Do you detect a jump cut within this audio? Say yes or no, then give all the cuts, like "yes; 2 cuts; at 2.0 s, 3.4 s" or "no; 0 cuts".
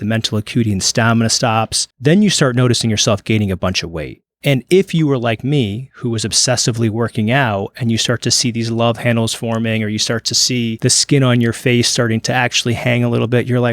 yes; 2 cuts; at 1.8 s, 10.8 s